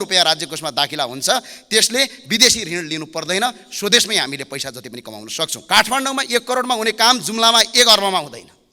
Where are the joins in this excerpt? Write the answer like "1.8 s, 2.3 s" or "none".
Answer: 5.6 s